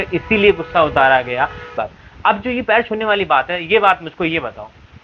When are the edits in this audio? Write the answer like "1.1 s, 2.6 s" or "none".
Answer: 1.7 s